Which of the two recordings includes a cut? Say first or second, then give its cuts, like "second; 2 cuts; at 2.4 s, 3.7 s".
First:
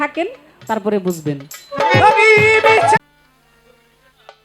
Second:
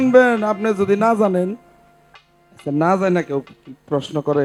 first; 1 cut; at 3.0 s